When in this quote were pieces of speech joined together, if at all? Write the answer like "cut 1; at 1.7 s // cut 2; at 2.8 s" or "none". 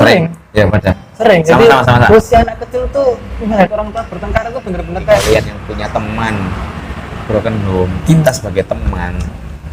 cut 1; at 5.3 s